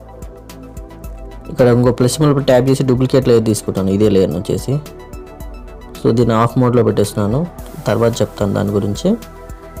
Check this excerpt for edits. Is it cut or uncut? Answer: uncut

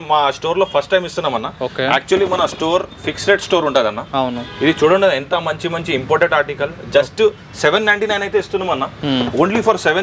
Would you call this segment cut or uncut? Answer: uncut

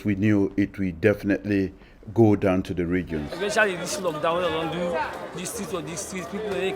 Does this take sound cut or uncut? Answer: uncut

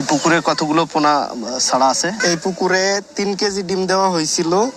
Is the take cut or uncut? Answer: uncut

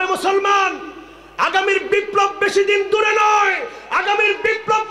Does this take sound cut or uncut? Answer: uncut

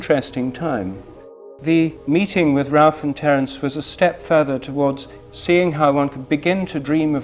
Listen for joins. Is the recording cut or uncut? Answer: cut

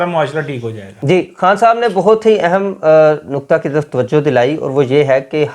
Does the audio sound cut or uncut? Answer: uncut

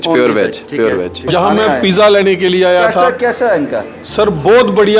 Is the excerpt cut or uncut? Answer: cut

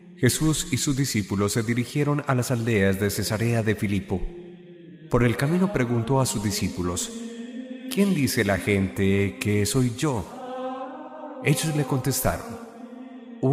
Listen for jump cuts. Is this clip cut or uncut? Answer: uncut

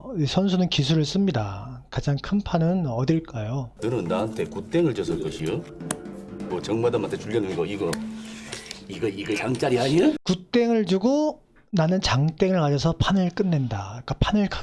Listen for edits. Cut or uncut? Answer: cut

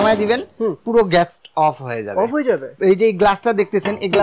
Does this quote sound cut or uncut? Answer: cut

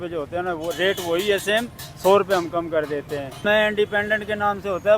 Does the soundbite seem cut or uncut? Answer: cut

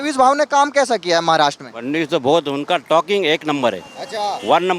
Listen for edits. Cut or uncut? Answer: uncut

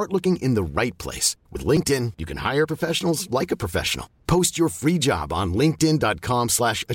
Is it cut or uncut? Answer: uncut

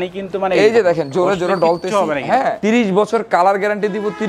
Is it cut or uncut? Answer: cut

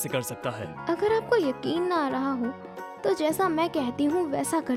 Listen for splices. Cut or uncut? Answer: uncut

